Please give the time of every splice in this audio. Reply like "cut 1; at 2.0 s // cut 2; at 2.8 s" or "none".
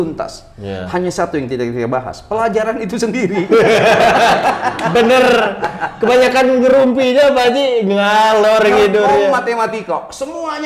cut 1; at 4.8 s